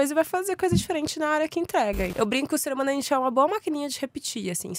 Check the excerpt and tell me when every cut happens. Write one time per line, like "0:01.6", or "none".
0:02.1